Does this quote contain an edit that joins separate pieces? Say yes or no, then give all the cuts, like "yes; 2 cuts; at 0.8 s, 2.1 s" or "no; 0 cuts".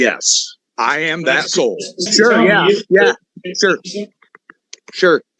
yes; 1 cut; at 2.1 s